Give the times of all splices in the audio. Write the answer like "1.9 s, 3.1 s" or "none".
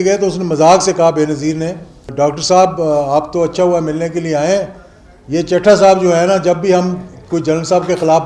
2.1 s